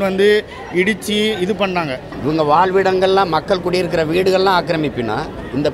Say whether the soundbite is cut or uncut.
cut